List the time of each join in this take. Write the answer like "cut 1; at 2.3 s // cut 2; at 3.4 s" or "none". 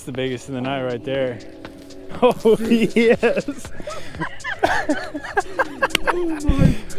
none